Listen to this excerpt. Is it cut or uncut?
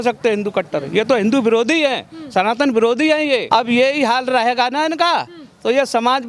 cut